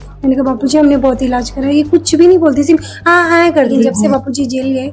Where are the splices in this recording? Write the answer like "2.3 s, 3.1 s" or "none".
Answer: 3.8 s